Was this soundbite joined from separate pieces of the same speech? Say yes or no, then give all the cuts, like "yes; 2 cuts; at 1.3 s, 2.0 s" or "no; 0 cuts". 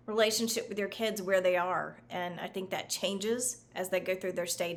no; 0 cuts